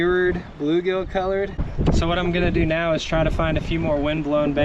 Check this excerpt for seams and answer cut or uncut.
cut